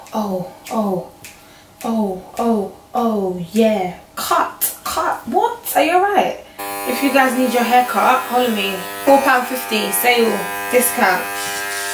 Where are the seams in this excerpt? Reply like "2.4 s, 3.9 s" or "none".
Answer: 6.6 s